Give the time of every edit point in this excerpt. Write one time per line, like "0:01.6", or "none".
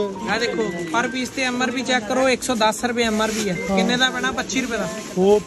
none